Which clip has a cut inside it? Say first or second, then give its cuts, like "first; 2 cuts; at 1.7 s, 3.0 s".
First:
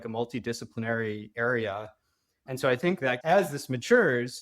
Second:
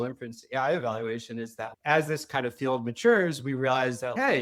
first; 1 cut; at 3.2 s